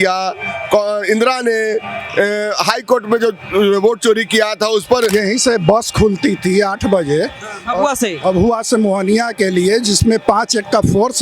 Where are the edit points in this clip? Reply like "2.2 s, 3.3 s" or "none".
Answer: 5.1 s